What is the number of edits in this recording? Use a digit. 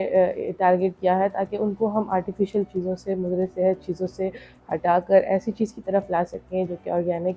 0